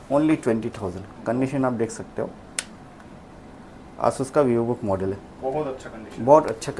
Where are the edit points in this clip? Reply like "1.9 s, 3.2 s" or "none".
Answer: none